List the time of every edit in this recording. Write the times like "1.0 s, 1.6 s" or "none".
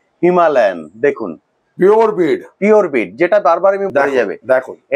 3.9 s